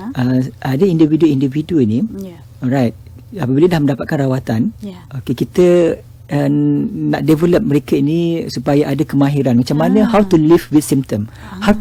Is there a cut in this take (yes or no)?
no